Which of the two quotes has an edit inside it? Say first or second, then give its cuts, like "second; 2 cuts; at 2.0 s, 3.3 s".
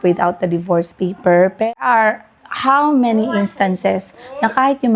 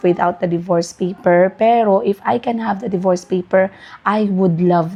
first; 1 cut; at 1.7 s